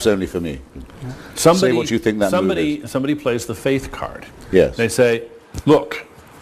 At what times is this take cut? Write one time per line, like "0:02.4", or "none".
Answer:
0:02.8